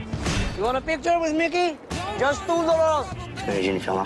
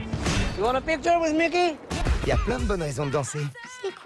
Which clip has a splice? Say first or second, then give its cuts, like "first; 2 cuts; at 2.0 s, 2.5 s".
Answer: second; 1 cut; at 2.0 s